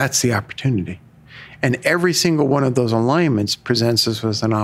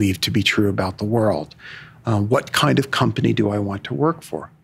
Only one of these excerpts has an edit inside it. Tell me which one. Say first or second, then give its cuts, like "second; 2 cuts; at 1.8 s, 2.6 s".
first; 1 cut; at 3.6 s